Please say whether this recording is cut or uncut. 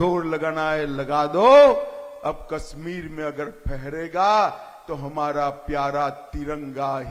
uncut